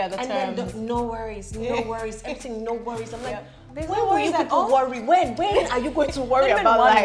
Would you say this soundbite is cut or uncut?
uncut